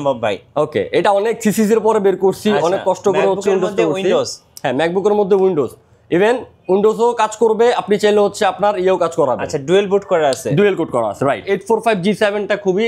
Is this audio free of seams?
no; 1 cut; at 11.5 s

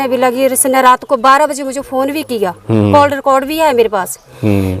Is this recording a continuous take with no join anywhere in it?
yes; 0 cuts

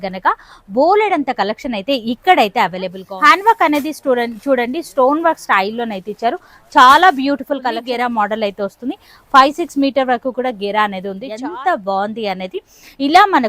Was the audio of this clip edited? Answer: yes; 3 cuts; at 3.0 s, 7.8 s, 11.3 s

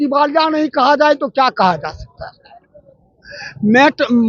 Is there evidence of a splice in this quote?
no; 0 cuts

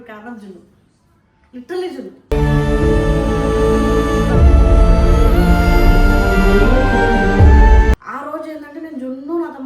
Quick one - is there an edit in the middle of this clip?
yes; 1 cut; at 8.1 s

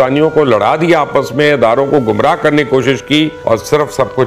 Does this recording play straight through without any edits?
no; 1 cut; at 3.4 s

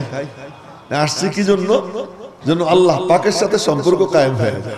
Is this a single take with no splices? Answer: yes; 0 cuts

